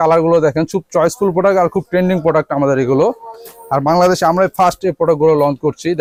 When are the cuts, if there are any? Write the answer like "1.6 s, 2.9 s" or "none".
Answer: none